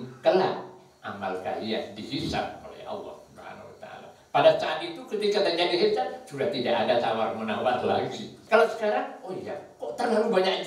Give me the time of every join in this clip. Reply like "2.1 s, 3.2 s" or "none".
8.3 s